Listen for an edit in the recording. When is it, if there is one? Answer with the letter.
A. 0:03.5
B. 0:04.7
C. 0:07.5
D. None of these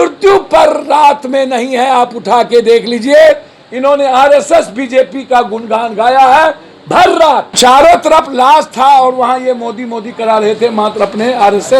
C